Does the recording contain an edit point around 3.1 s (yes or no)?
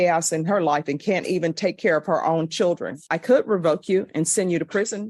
yes